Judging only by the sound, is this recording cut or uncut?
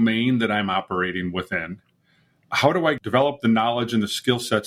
cut